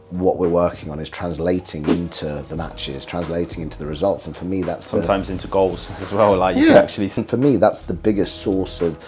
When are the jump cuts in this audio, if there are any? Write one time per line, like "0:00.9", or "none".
none